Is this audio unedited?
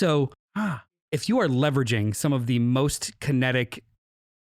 no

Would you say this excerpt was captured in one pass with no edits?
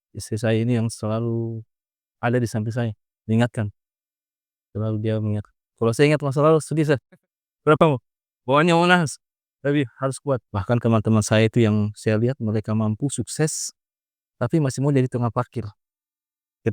no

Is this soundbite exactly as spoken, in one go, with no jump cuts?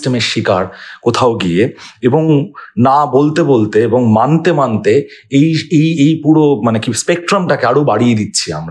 yes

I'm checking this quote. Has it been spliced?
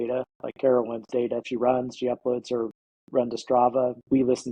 yes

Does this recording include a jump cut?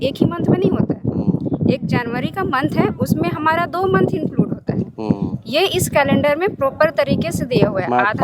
no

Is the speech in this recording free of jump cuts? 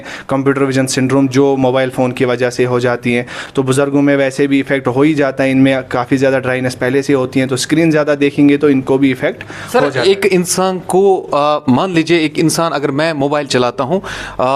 yes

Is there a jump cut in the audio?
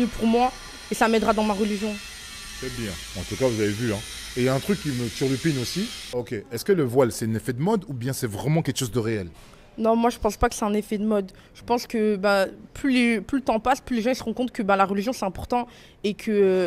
yes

